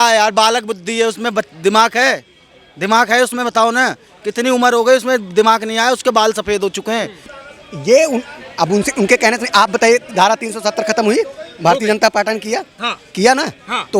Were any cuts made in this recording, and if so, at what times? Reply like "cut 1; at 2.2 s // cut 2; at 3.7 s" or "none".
cut 1; at 7.2 s